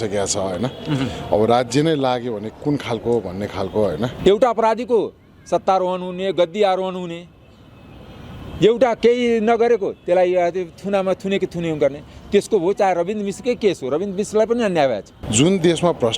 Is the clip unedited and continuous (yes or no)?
no